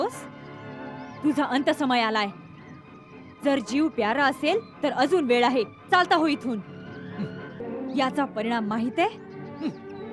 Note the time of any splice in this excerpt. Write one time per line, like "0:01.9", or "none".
0:07.6